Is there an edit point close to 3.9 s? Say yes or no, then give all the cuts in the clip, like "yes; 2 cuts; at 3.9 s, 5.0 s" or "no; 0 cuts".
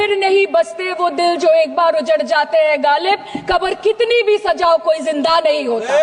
no; 0 cuts